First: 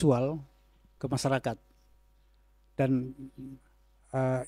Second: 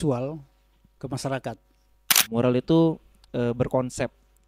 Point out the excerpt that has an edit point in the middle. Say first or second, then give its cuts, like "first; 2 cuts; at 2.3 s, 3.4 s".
second; 1 cut; at 2.2 s